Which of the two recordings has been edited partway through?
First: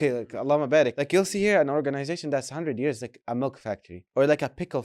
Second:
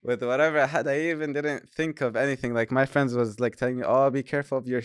first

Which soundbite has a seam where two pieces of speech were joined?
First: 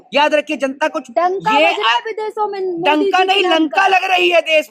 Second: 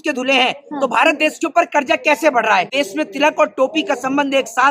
second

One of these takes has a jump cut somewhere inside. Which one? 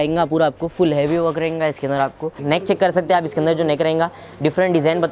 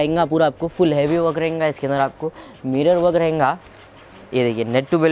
first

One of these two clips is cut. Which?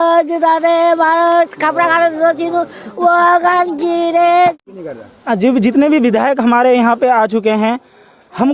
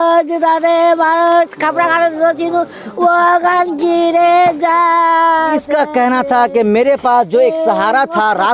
first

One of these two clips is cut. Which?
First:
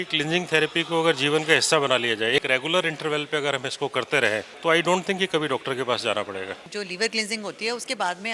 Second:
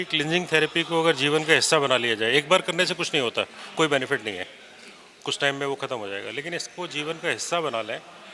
first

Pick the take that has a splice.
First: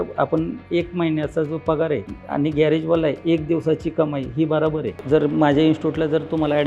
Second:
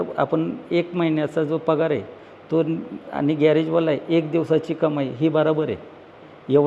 first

